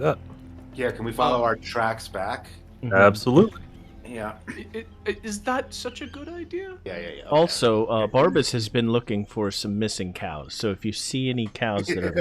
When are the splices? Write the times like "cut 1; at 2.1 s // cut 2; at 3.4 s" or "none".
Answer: cut 1; at 6.9 s